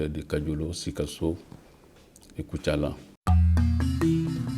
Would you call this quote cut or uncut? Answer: cut